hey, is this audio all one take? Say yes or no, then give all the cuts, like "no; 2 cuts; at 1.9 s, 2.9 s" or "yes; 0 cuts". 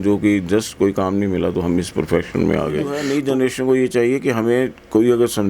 no; 1 cut; at 3.0 s